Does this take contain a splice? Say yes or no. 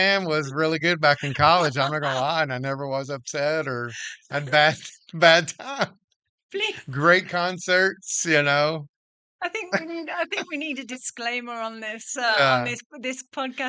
no